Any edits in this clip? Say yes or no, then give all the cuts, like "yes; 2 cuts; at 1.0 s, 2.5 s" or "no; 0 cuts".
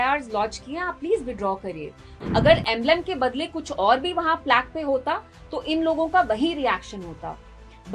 yes; 1 cut; at 2.1 s